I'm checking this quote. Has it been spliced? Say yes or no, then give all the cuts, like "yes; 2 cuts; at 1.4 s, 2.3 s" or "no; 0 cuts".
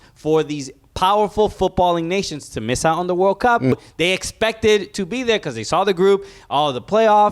yes; 1 cut; at 3.7 s